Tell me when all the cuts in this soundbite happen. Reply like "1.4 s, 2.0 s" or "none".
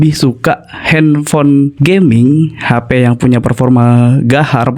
1.8 s